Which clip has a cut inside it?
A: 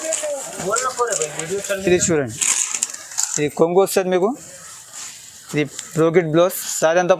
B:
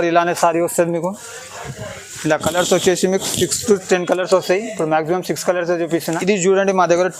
B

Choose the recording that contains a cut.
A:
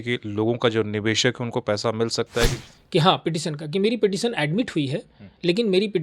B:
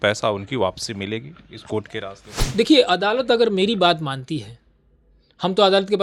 A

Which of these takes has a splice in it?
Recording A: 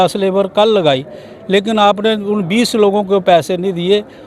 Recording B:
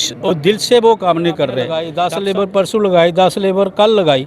B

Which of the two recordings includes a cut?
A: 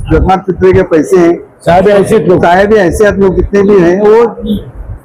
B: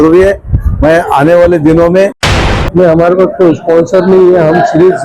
B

